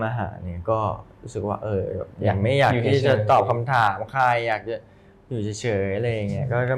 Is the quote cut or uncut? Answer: uncut